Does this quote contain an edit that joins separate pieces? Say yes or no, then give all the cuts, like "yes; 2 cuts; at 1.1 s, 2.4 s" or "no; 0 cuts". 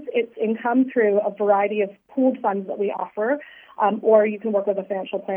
no; 0 cuts